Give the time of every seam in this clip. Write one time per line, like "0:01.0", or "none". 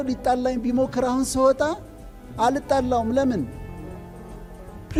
none